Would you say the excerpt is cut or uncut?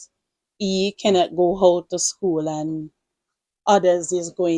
uncut